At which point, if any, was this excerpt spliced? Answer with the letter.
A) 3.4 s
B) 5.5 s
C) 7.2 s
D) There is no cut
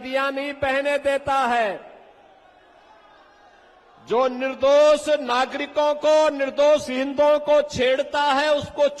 D